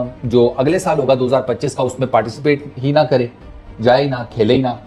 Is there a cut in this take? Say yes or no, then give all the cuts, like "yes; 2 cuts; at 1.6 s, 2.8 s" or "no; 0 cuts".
no; 0 cuts